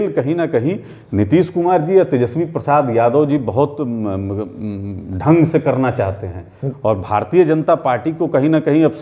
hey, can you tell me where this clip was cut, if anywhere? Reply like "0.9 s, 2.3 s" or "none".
none